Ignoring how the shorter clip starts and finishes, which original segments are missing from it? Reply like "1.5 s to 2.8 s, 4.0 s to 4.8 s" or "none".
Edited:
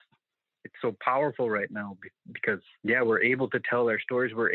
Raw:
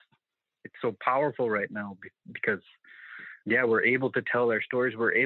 2.7 s to 3.3 s